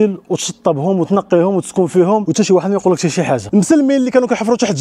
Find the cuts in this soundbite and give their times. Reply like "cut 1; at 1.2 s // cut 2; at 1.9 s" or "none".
cut 1; at 3.4 s